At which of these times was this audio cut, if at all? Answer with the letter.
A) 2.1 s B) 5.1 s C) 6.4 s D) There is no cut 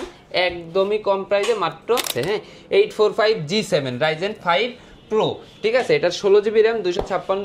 A